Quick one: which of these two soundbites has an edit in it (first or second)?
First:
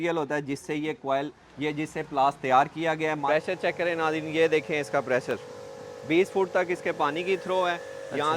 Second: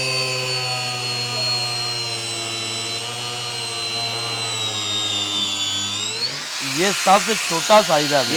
first